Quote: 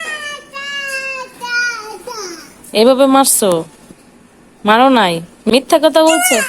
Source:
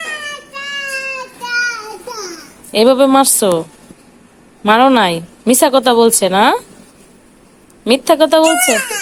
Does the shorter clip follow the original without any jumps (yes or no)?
no